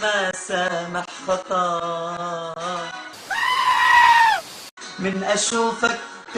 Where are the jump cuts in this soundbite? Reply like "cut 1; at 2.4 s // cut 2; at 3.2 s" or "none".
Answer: cut 1; at 3.2 s // cut 2; at 4.6 s